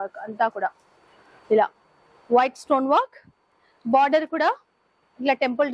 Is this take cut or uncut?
uncut